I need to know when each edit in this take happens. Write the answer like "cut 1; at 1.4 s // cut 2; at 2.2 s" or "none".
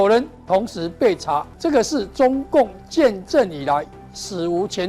cut 1; at 1.5 s